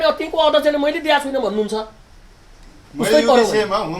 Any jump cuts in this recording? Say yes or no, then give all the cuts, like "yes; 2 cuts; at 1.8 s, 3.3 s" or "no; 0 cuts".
no; 0 cuts